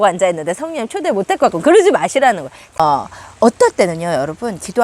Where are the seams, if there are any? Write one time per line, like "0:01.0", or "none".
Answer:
0:02.8